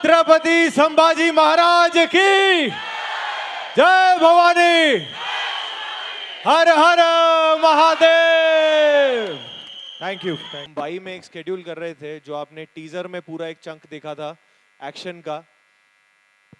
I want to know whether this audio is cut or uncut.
cut